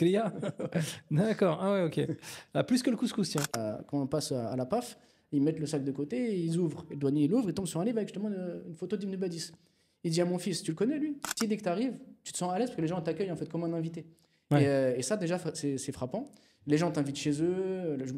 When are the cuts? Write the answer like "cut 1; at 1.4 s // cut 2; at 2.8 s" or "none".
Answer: cut 1; at 3.6 s // cut 2; at 11.3 s